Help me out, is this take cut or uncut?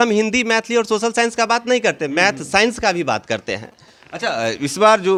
uncut